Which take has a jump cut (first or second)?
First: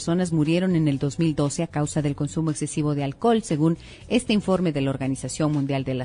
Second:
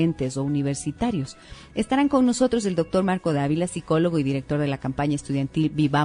first